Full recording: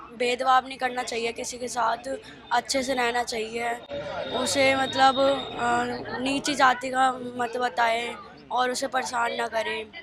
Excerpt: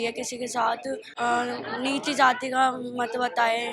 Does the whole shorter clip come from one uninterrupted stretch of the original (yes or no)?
no